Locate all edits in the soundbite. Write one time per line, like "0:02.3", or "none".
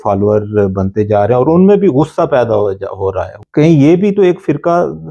0:03.4